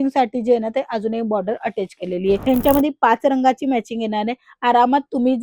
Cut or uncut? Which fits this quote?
cut